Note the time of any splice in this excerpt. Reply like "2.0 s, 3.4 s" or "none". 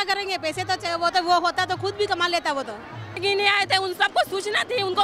3.2 s

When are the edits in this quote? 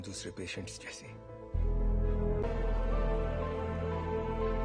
2.4 s

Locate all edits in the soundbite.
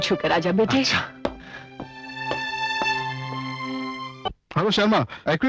4.1 s

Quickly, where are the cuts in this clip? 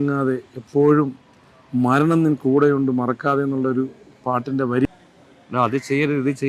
4.9 s

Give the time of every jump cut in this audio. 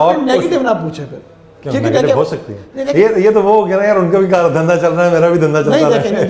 none

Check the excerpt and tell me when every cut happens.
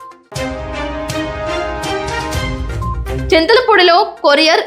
3.0 s

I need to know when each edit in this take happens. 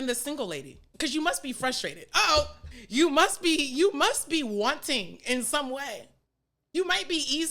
0.9 s, 2.6 s, 6.6 s

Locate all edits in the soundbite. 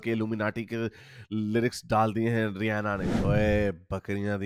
3.1 s

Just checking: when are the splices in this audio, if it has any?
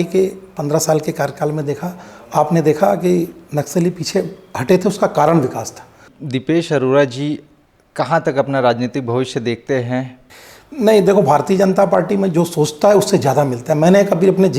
6.2 s, 10.2 s

